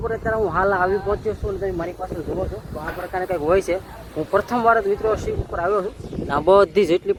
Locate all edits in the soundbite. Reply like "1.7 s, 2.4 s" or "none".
none